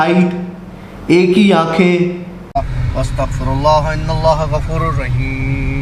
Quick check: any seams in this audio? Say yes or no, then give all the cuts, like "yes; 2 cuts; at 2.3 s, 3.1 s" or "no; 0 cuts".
yes; 1 cut; at 2.4 s